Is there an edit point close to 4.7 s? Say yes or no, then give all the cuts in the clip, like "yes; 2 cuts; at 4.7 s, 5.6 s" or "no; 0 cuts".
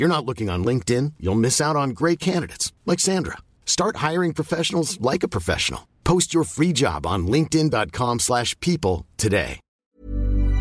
no; 1 cut; at 9.7 s